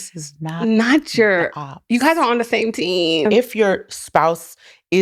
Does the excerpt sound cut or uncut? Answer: cut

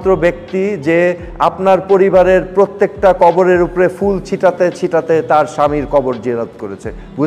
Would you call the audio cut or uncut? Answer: uncut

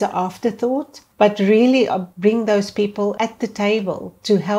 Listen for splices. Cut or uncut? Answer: cut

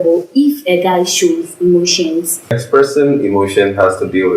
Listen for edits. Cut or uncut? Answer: cut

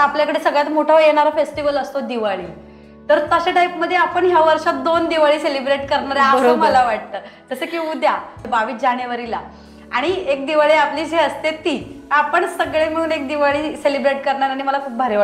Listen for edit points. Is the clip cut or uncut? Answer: uncut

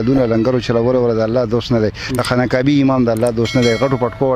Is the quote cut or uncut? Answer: uncut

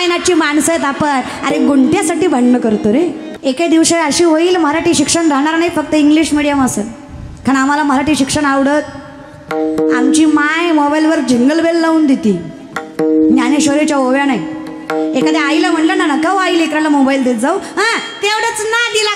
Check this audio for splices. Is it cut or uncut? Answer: cut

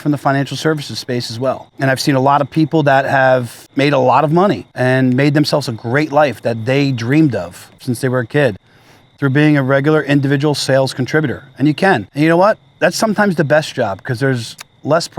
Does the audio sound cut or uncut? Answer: cut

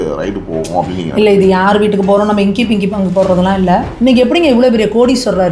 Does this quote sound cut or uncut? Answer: cut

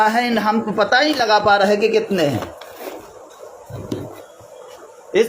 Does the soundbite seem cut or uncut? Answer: uncut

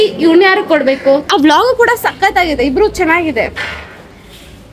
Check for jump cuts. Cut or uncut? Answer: cut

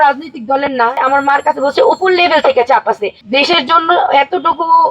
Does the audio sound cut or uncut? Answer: cut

